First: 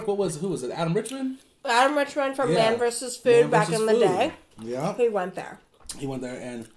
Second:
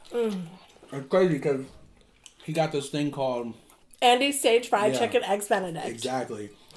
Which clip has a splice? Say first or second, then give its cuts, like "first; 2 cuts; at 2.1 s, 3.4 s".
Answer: second; 1 cut; at 3.8 s